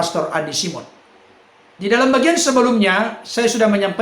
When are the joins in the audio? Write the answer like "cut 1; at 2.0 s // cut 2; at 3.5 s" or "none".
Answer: none